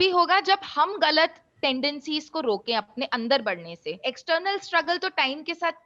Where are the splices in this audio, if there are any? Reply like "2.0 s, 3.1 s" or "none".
4.0 s

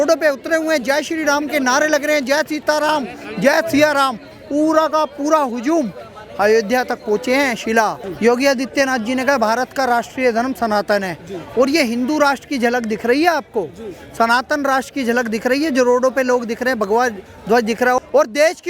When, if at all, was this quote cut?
8.0 s, 18.0 s

